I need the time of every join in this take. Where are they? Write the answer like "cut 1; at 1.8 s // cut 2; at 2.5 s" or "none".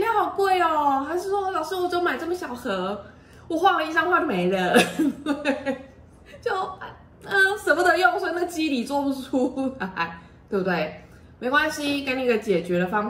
none

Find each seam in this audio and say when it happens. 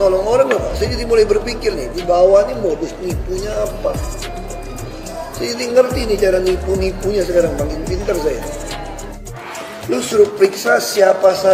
cut 1; at 9.1 s

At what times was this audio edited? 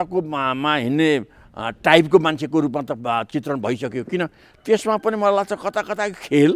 none

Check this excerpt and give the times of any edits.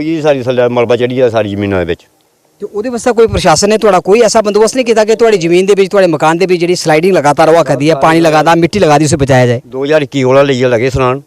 none

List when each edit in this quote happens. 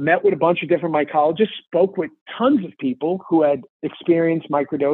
cut 1; at 2.2 s

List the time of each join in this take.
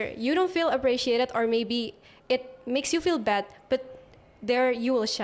none

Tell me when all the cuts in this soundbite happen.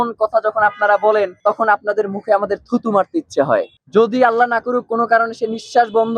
cut 1; at 1.3 s // cut 2; at 3.7 s

